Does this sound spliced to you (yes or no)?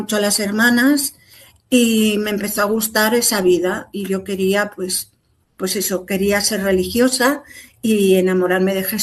no